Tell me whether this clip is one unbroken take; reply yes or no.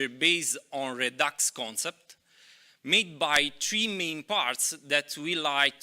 yes